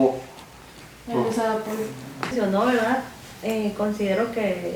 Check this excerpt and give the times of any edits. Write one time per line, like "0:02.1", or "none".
0:02.3